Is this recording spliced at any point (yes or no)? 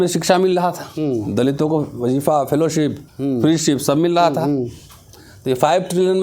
no